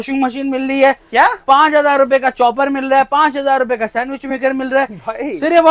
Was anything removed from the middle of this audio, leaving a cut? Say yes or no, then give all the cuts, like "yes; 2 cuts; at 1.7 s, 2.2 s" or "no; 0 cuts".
no; 0 cuts